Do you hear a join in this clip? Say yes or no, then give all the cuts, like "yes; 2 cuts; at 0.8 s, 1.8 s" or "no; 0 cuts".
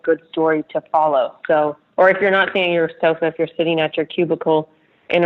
no; 0 cuts